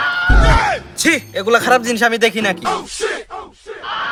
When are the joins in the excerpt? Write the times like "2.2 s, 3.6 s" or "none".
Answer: none